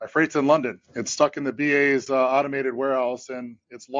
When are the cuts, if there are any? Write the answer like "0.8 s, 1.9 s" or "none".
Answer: none